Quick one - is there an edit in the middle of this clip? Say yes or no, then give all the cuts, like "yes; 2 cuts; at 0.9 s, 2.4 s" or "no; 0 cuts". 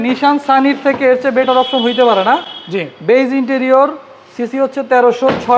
no; 0 cuts